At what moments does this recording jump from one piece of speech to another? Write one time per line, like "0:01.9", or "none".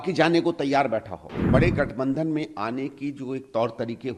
0:01.3